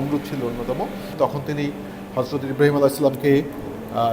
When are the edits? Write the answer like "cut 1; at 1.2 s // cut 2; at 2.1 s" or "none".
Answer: none